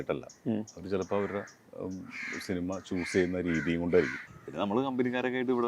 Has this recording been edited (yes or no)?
yes